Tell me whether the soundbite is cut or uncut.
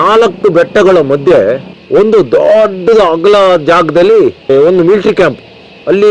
uncut